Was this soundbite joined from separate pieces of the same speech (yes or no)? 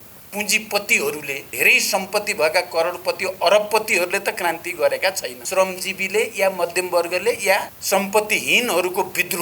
yes